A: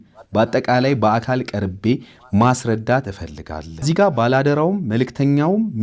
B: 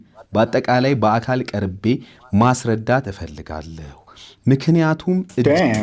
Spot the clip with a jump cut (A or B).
A